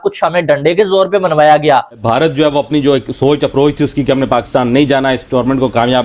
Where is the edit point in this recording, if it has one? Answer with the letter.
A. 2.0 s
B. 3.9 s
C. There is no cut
A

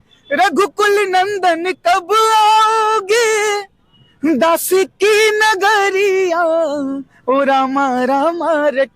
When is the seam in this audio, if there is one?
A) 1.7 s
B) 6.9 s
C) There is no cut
C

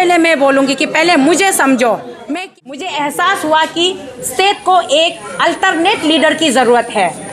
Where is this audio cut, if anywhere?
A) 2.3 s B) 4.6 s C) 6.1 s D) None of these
A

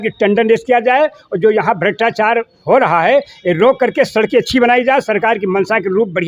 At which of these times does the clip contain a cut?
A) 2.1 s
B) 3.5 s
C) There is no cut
C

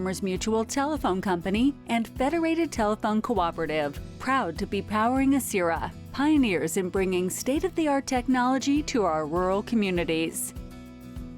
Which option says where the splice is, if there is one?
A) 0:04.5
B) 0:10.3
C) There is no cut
B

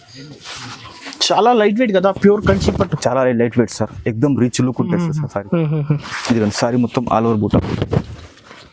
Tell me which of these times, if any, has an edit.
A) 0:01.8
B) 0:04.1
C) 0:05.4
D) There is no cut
C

